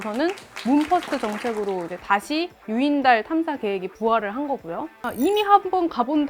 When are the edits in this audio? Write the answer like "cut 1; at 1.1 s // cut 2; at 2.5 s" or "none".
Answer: cut 1; at 5.1 s